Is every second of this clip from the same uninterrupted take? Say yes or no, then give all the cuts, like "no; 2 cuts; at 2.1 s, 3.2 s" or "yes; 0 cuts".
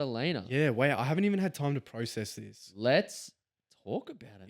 yes; 0 cuts